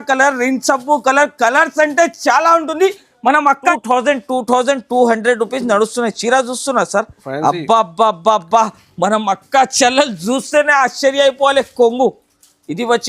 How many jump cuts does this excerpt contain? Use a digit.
1